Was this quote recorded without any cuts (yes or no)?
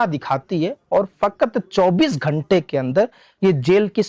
yes